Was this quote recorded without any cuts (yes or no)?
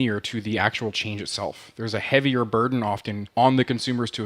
no